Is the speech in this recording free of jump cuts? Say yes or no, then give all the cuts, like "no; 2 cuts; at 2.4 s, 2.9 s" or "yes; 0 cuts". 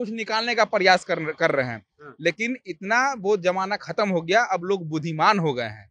yes; 0 cuts